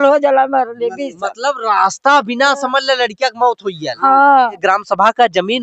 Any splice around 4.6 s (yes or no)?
yes